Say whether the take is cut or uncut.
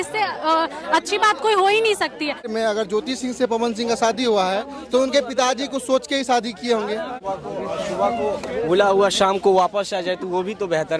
cut